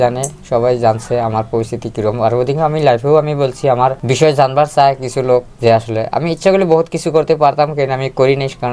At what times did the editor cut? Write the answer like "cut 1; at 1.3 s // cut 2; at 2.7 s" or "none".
none